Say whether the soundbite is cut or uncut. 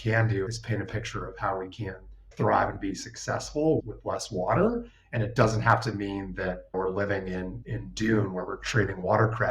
cut